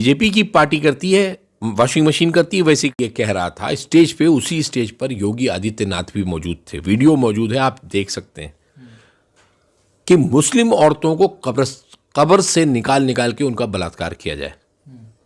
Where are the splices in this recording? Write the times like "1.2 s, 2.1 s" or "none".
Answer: 2.9 s